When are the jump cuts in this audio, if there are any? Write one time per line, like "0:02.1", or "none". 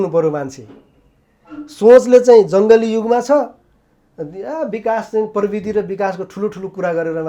none